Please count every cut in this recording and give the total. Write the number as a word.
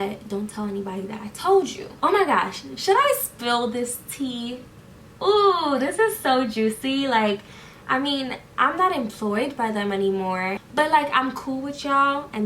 two